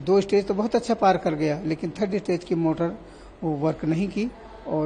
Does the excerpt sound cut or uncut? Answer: uncut